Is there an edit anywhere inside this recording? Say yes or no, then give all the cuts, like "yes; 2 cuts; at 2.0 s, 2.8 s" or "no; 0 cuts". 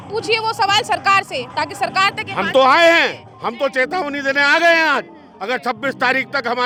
no; 0 cuts